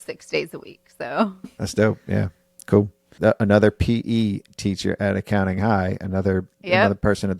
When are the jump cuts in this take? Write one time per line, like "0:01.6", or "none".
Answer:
0:01.4
0:03.1